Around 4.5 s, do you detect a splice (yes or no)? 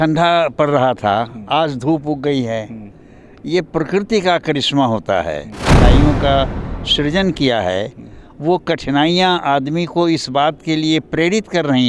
no